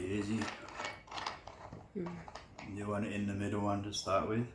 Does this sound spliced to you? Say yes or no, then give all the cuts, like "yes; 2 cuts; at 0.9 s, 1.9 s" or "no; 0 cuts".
no; 0 cuts